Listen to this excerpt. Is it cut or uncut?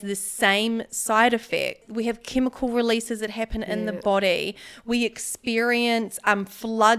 uncut